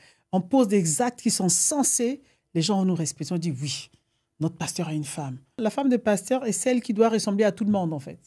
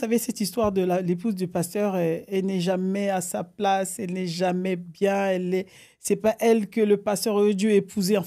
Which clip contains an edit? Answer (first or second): first